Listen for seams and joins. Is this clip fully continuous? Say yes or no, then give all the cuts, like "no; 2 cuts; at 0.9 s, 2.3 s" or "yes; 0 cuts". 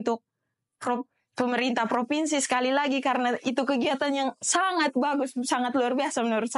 yes; 0 cuts